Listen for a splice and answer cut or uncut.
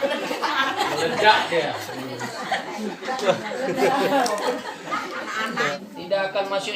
cut